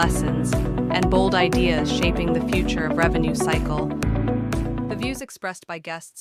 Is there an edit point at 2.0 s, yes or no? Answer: no